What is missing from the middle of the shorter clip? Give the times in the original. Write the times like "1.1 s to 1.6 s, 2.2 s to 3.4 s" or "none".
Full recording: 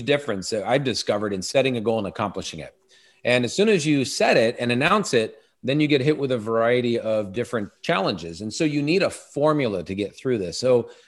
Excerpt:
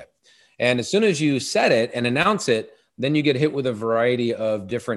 none